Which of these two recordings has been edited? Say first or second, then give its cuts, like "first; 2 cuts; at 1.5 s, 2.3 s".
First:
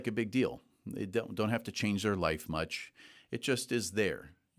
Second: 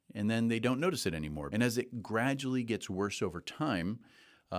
second; 1 cut; at 1.4 s